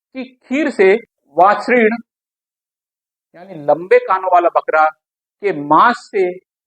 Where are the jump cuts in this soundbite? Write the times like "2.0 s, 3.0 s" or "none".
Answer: 1.2 s